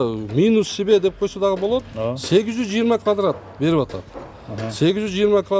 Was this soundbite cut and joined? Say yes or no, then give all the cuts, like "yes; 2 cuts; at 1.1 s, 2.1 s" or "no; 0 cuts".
no; 0 cuts